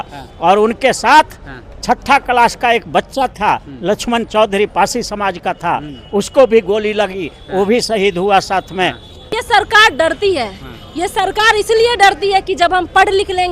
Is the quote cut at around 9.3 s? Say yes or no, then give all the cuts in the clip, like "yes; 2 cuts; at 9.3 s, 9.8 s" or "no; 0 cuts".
yes; 1 cut; at 9.3 s